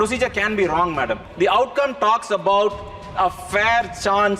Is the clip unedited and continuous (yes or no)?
no